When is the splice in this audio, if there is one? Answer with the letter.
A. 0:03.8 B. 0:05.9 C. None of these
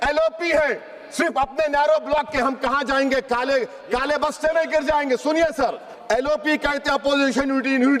B